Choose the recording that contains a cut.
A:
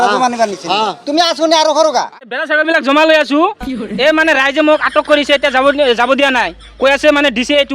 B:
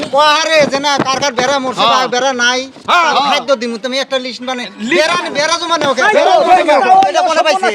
A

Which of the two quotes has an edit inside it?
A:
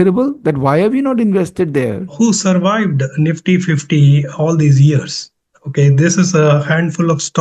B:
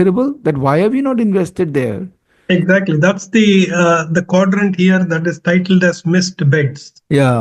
A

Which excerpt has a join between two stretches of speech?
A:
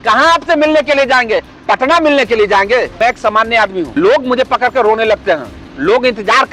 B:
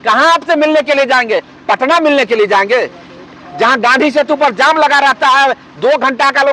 A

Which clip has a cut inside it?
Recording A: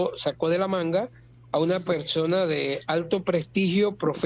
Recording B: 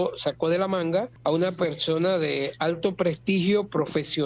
B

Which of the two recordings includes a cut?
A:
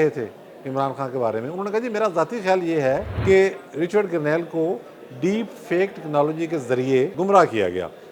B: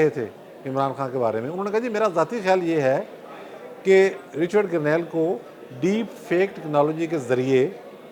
A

